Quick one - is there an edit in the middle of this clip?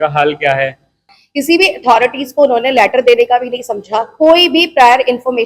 yes; 1 cut; at 1.2 s

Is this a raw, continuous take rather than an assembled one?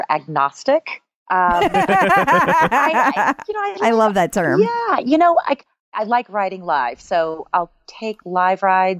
no; 1 cut; at 5.8 s

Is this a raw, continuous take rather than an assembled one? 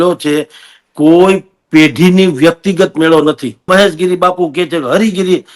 no; 1 cut; at 3.7 s

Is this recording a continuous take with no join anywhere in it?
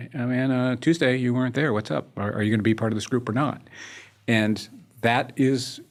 yes; 0 cuts

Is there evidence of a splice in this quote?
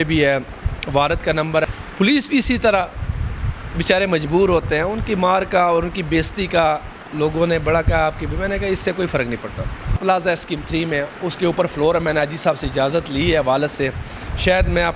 yes; 2 cuts; at 1.6 s, 10.0 s

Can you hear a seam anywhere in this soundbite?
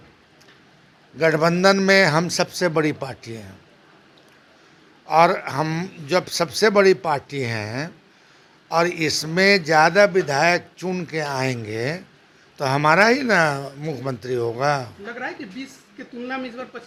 no; 0 cuts

